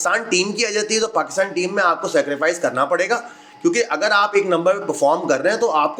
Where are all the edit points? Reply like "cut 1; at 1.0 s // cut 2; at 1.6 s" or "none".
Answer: none